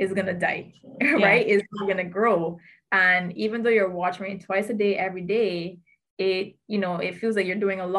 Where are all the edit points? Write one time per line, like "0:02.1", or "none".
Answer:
none